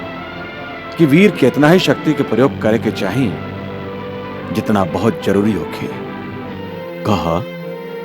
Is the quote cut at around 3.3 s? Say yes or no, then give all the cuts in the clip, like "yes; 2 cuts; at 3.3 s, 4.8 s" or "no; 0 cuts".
no; 1 cut; at 6.7 s